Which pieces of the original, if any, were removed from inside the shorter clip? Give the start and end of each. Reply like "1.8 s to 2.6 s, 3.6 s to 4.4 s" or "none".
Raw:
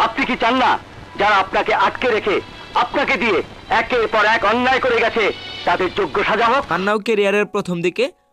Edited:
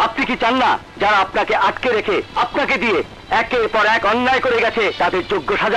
0.9 s to 1.1 s, 2.5 s to 2.7 s, 5.3 s to 5.6 s